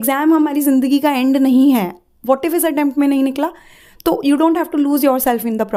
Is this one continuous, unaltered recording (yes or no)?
yes